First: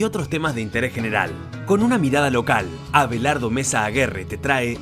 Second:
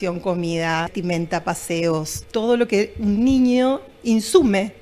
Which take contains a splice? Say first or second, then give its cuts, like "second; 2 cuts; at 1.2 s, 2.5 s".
second; 2 cuts; at 0.9 s, 2.2 s